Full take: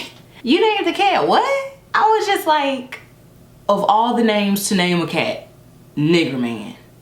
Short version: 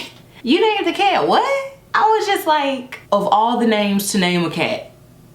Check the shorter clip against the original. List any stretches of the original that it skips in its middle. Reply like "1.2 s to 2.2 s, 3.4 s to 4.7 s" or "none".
2.9 s to 3.5 s